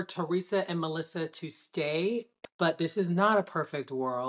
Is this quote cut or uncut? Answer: cut